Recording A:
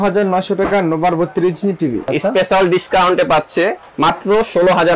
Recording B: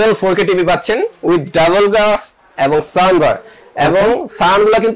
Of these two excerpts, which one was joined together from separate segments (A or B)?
A